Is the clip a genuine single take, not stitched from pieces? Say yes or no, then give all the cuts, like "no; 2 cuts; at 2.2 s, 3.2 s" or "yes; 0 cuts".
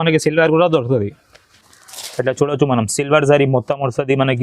no; 1 cut; at 1.6 s